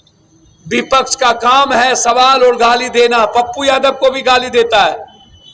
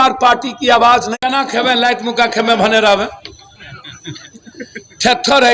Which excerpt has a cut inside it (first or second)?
second